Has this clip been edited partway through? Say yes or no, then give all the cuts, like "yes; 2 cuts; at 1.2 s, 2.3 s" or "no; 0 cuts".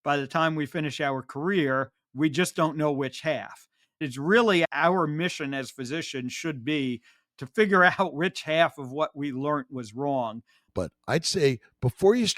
yes; 2 cuts; at 4.0 s, 10.6 s